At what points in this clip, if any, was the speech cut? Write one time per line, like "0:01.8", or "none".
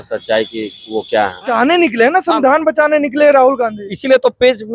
0:01.5